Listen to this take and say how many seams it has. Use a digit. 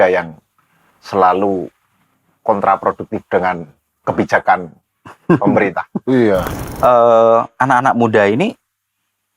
1